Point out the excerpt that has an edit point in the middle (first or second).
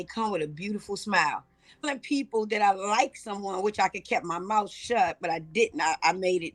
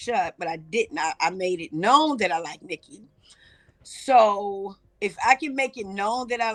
first